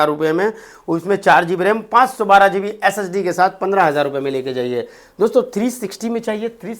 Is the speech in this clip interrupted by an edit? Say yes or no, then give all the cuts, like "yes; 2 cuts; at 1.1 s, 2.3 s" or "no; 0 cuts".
no; 0 cuts